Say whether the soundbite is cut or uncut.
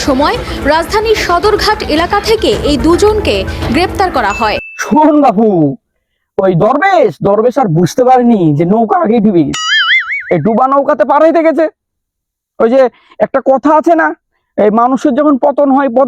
cut